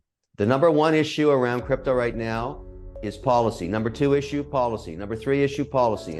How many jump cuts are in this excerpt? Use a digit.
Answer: 0